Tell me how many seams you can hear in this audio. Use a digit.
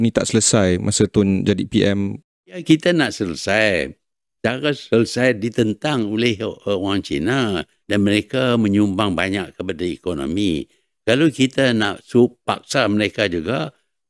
2